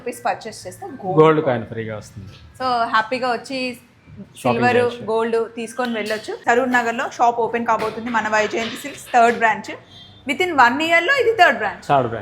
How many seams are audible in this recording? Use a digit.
1